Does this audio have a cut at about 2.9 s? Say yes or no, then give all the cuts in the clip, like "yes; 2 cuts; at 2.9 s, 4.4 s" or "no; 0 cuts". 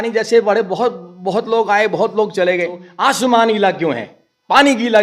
yes; 1 cut; at 2.9 s